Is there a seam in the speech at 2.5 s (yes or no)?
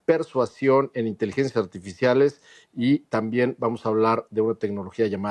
no